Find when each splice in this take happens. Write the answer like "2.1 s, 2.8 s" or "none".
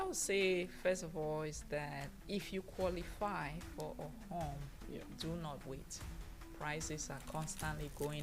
2.1 s